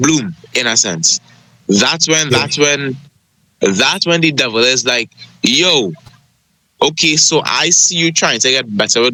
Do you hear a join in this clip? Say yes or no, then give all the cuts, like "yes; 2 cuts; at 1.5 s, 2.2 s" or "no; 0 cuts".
no; 0 cuts